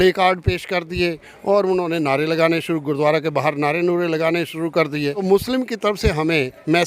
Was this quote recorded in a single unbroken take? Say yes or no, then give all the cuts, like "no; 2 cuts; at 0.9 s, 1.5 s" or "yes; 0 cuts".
no; 1 cut; at 5.2 s